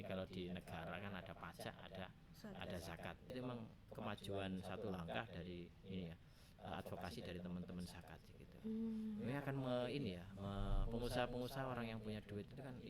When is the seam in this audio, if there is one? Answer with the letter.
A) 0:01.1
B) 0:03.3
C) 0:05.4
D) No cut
B